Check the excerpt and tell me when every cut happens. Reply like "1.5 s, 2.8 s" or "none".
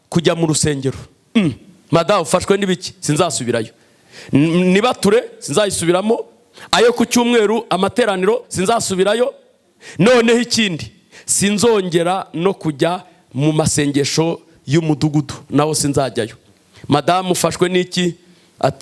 none